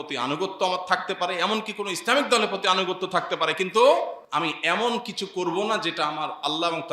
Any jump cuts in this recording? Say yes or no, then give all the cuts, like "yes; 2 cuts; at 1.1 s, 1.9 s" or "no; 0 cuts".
yes; 1 cut; at 4.2 s